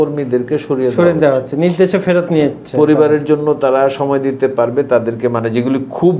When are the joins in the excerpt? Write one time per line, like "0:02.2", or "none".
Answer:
none